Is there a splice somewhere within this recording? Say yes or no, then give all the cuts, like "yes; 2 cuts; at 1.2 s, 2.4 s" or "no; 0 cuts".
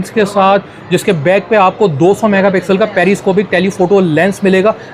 no; 0 cuts